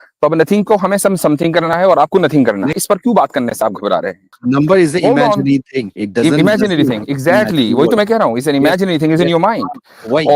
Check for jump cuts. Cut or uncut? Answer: cut